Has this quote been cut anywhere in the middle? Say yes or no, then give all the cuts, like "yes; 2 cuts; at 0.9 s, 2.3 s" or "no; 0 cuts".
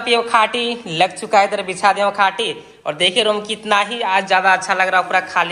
no; 0 cuts